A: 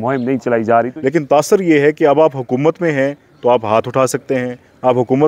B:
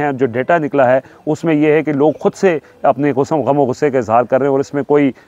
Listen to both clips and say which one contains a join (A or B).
A